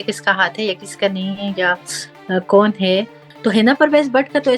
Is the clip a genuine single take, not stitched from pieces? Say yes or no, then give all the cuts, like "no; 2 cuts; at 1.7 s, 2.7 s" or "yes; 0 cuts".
no; 1 cut; at 3.2 s